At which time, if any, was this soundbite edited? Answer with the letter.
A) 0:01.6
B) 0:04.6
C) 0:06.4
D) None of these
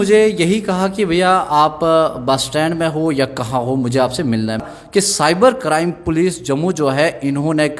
B